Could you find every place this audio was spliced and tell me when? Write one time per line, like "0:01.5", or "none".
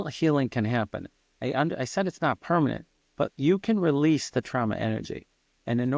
none